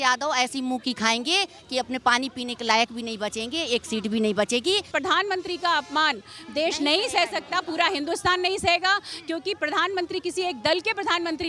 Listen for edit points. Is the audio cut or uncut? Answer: cut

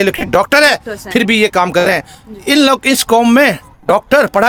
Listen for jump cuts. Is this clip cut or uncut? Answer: uncut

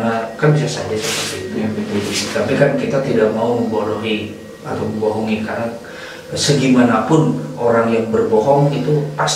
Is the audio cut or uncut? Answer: uncut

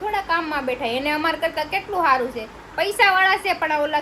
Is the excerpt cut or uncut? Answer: uncut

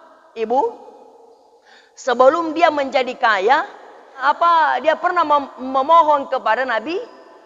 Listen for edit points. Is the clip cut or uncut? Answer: cut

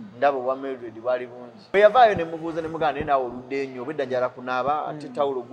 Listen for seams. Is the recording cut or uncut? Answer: cut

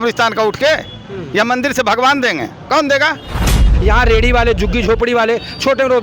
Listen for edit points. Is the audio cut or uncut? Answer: cut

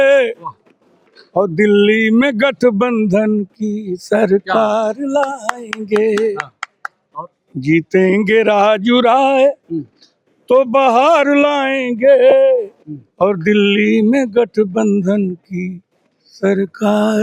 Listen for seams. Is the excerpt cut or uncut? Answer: uncut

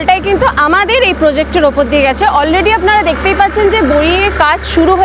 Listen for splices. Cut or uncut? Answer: uncut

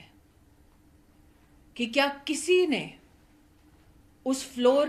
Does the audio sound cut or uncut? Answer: uncut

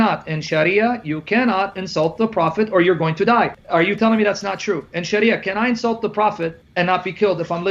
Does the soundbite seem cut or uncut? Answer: uncut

